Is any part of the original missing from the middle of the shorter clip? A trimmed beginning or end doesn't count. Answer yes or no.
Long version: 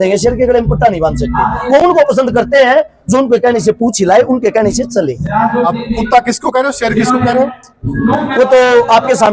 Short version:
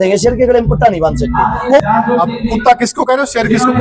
yes